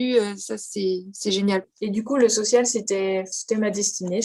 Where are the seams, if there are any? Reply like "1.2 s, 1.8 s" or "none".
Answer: 1.7 s, 3.3 s